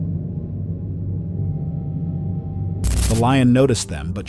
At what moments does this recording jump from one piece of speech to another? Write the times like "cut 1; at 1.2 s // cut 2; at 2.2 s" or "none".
cut 1; at 2.8 s